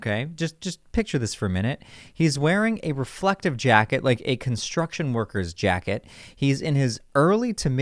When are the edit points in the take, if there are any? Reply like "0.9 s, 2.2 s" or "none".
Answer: none